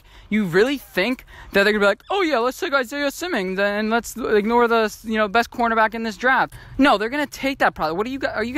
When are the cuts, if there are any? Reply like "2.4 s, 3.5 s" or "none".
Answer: 6.5 s